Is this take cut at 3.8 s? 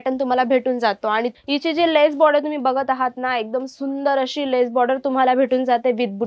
no; 1 cut; at 1.3 s

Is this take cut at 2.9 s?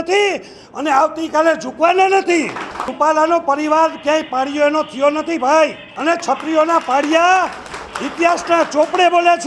yes; 2 cuts; at 2.9 s, 5.9 s

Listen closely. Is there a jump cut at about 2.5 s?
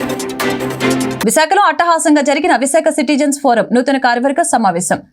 no; 1 cut; at 1.2 s

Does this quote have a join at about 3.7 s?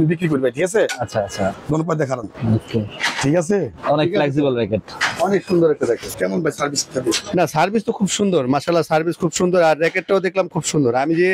no; 2 cuts; at 1.6 s, 6.1 s

